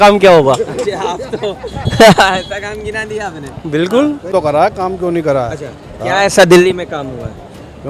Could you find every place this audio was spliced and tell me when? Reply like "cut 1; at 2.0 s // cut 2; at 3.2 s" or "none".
cut 1; at 4.3 s